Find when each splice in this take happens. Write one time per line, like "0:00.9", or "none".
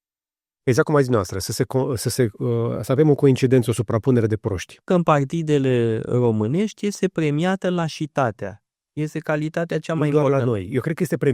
0:04.9